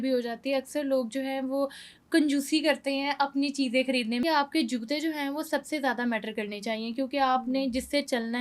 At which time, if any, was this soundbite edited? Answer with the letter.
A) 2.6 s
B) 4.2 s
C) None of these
B